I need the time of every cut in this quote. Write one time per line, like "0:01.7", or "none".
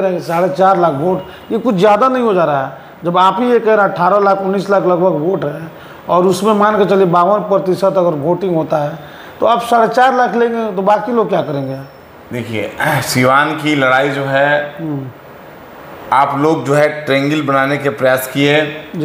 none